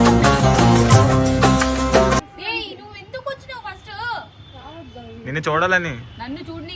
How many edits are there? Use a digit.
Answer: 1